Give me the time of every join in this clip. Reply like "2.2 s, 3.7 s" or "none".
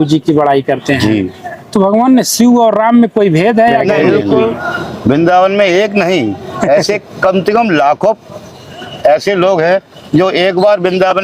4.4 s